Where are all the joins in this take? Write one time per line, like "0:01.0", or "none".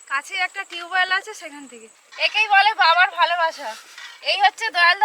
0:02.0